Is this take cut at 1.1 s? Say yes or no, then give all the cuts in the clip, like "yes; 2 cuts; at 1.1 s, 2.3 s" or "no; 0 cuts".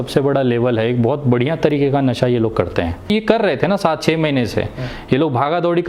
no; 1 cut; at 3.1 s